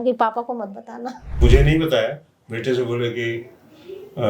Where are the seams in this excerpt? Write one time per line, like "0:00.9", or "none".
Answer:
0:01.4